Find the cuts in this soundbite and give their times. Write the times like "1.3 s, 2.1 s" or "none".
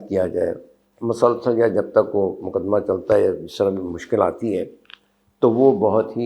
none